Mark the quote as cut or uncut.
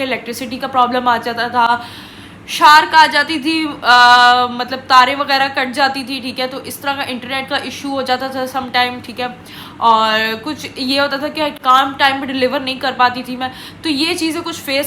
uncut